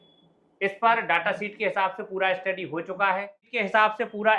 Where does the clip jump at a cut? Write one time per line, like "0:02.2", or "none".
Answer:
0:03.4